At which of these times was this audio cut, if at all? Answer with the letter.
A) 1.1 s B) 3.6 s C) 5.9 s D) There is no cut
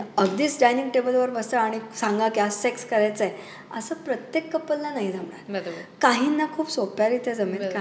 D